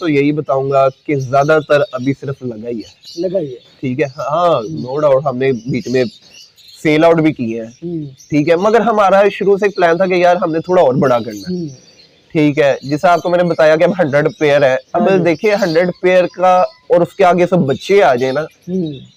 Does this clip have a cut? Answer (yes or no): no